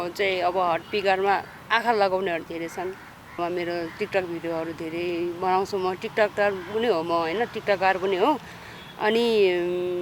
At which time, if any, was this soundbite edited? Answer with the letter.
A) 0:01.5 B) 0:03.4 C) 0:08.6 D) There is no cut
B